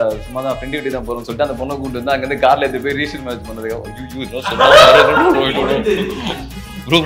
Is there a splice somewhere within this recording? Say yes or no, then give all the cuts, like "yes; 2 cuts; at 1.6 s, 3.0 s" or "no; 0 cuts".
no; 0 cuts